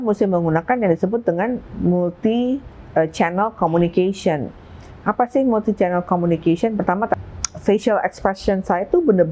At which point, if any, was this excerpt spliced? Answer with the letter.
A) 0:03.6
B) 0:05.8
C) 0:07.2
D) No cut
C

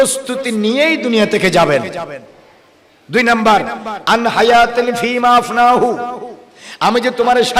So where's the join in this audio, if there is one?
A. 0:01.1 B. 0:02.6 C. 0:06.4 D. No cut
D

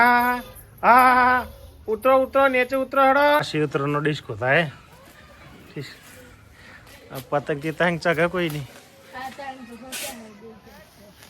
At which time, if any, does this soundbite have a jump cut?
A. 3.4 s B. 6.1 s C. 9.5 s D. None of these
A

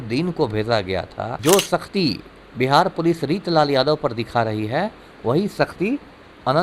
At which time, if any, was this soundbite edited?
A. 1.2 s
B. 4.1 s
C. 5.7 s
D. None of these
A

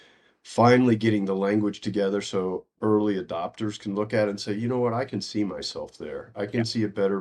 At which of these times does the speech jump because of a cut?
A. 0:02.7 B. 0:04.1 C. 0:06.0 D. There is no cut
A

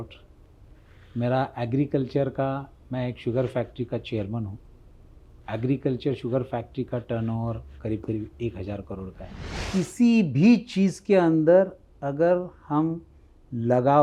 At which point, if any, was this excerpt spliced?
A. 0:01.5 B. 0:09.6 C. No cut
B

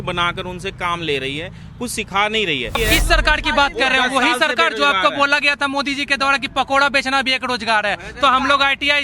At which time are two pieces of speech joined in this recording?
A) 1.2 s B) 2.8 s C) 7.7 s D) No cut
B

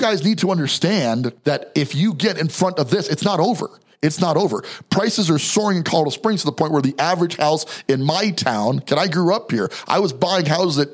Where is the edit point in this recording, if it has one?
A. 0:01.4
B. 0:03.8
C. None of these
A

